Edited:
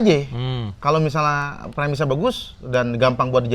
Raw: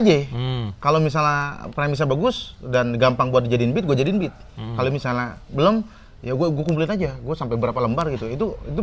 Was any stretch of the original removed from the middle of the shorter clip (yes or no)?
no